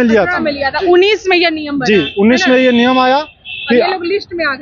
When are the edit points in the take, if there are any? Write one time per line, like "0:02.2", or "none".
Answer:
none